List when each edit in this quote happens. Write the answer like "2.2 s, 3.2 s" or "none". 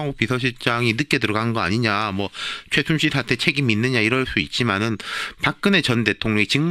5.2 s